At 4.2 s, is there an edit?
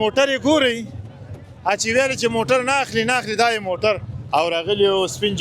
yes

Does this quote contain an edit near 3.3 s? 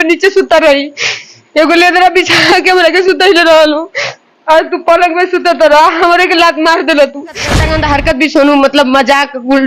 no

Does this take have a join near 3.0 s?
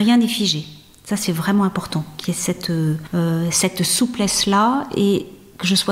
yes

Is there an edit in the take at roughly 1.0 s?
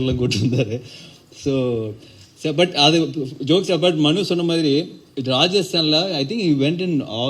no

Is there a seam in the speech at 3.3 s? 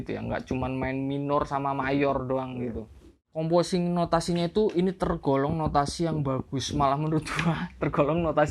yes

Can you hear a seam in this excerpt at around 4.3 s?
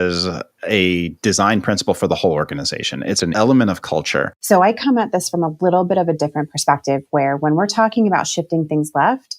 yes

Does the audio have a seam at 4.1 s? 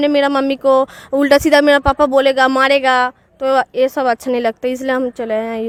no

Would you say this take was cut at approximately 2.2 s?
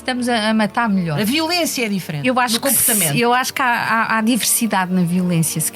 yes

